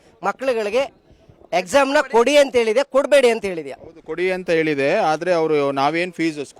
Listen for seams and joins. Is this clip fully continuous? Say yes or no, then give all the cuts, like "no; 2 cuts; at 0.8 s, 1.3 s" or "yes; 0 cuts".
yes; 0 cuts